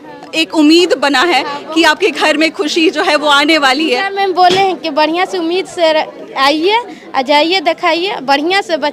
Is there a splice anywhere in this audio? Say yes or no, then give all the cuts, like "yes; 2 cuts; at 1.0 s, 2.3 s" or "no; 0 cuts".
no; 0 cuts